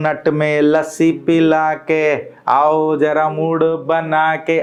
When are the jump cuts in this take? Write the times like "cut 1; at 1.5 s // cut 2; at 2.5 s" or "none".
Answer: none